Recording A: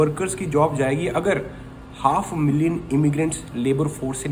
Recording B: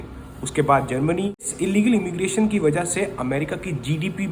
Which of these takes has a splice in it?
B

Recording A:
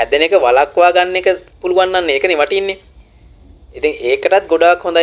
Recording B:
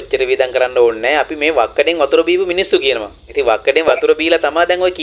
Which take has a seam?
B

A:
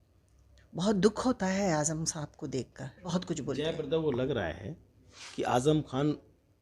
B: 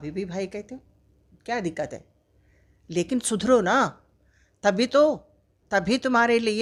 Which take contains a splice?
A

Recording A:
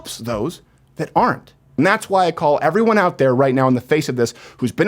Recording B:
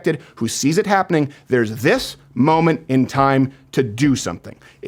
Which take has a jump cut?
A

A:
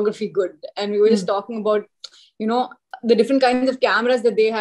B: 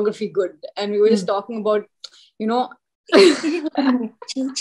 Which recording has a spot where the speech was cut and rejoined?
B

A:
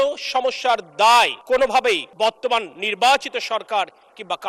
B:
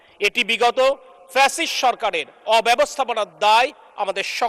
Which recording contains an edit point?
A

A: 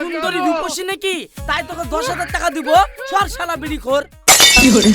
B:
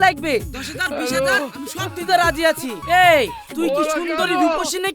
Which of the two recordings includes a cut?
B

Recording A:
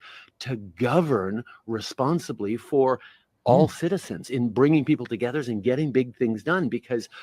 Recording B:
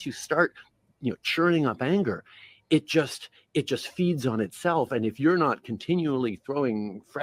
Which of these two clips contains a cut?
A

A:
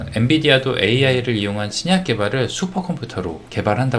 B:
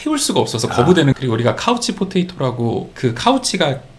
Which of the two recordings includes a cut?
B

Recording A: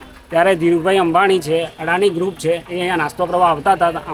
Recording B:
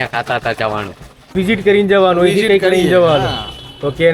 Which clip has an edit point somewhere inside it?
B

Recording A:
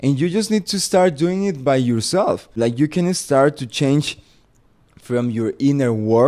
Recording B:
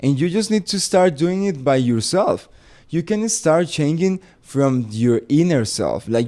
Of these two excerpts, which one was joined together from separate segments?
A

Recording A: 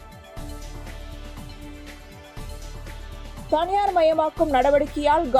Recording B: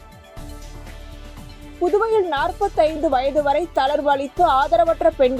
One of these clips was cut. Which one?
A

